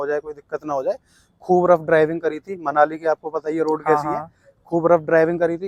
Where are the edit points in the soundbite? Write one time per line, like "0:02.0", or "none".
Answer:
none